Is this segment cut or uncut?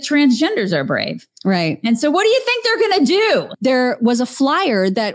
cut